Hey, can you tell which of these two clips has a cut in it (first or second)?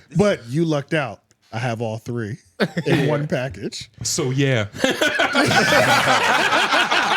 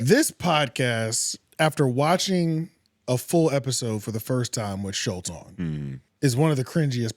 second